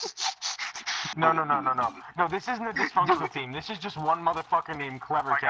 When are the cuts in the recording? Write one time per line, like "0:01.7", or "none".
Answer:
0:01.0